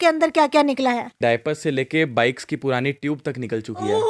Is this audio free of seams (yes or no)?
no